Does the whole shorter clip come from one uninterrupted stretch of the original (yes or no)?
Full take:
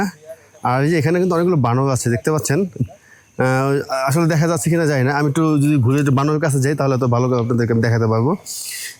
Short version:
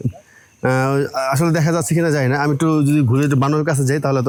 yes